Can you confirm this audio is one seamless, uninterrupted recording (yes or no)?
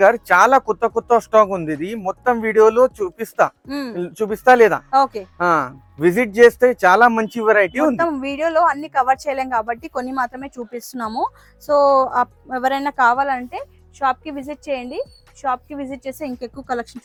yes